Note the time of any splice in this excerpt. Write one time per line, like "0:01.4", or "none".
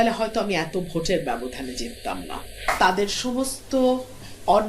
0:02.6